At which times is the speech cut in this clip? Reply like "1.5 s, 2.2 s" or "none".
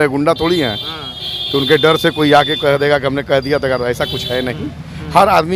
none